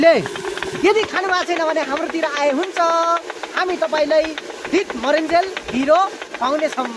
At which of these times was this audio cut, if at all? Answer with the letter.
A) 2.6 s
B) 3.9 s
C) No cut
C